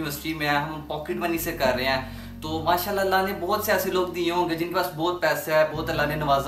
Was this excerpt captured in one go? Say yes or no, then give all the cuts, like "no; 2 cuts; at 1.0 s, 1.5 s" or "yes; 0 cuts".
yes; 0 cuts